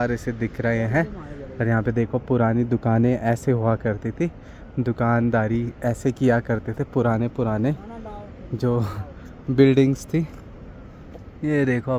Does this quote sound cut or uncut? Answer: uncut